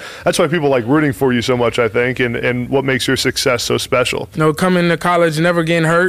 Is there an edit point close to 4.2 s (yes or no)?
yes